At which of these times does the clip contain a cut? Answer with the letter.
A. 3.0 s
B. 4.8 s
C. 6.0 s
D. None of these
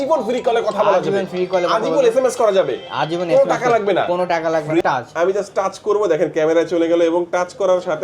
B